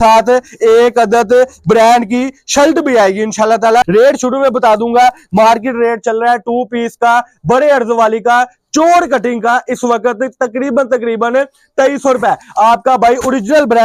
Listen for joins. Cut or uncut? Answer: cut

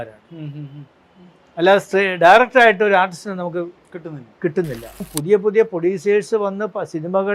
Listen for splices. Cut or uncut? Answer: cut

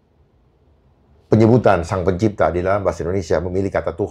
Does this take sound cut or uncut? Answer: uncut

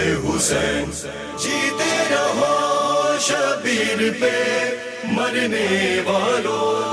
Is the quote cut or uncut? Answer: cut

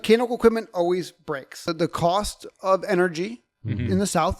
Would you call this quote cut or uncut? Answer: cut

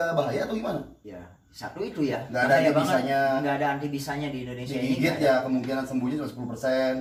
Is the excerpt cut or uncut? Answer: uncut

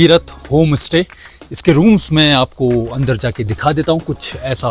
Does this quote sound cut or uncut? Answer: uncut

